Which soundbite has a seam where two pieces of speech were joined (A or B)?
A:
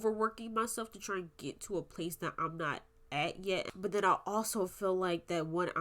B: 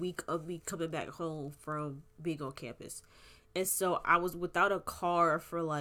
A